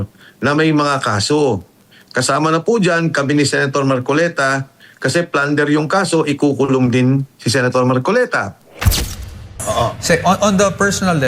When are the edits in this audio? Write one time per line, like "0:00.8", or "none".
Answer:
0:09.1